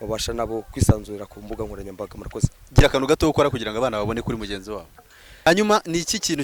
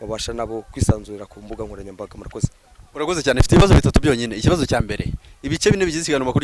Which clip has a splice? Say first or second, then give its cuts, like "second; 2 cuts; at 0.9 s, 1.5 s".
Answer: first; 2 cuts; at 2.6 s, 5.4 s